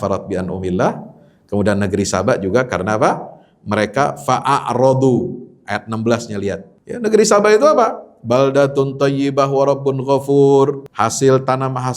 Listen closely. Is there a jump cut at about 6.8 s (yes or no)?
yes